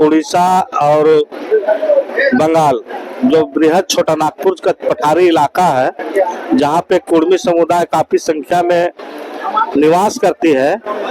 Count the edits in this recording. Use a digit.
0